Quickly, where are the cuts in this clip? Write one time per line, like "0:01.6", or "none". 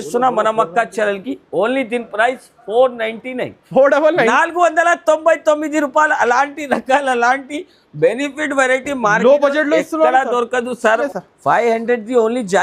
0:11.1